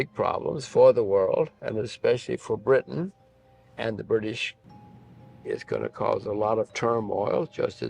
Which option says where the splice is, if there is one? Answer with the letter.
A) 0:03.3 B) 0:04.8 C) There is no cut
B